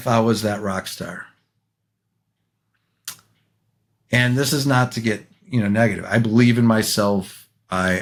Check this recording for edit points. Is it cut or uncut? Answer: uncut